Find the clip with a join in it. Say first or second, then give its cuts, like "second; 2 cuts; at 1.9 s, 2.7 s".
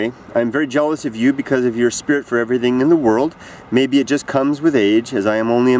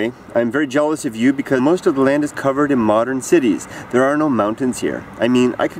first; 1 cut; at 1.6 s